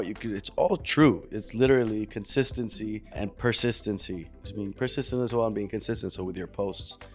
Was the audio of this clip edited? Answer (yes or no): yes